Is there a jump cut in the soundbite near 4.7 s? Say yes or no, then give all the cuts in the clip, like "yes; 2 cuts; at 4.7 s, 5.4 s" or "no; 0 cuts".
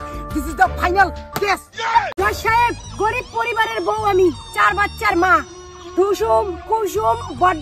no; 1 cut; at 2.1 s